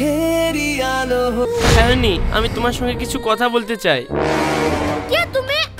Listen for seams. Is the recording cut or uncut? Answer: cut